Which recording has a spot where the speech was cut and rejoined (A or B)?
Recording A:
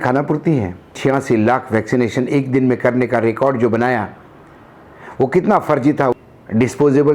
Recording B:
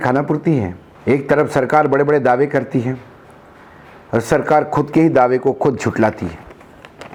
A